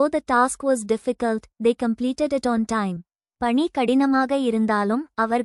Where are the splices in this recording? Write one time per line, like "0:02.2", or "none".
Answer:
none